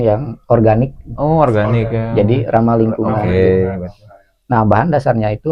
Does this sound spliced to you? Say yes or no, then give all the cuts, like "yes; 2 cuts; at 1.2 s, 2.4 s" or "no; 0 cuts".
no; 0 cuts